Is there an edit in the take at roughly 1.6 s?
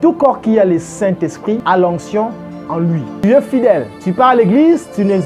yes; 3 cuts; at 1.6 s, 3.1 s, 4.0 s

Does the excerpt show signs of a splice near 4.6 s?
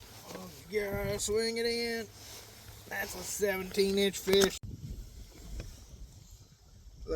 yes; 1 cut; at 4.6 s

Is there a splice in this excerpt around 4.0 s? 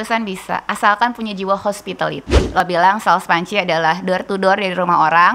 no; 1 cut; at 2.6 s

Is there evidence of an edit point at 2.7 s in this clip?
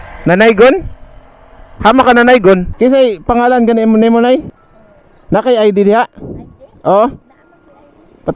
yes; 1 cut; at 2.7 s

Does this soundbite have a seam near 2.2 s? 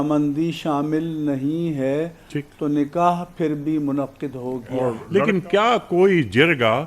no; 1 cut; at 5.0 s

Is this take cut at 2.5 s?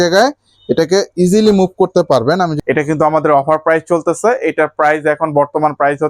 yes; 1 cut; at 2.5 s

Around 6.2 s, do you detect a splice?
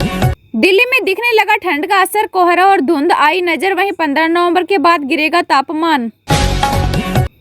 yes; 1 cut; at 6.2 s

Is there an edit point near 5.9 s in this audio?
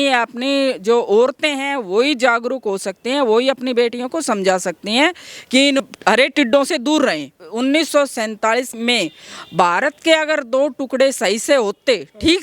no; 2 cuts; at 7.4 s, 8.8 s

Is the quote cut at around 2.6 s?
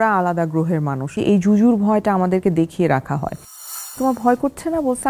no; 2 cuts; at 1.2 s, 3.9 s

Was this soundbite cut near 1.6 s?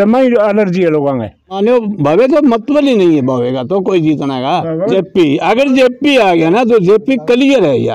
yes; 2 cuts; at 1.6 s, 4.9 s

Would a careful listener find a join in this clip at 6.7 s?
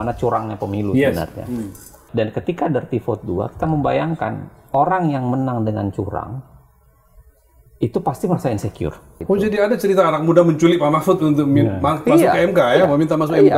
no; 2 cuts; at 2.0 s, 9.2 s

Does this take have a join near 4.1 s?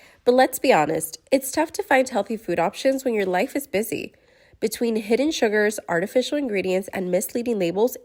no; 0 cuts

